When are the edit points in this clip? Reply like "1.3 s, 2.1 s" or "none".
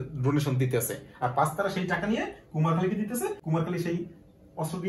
3.4 s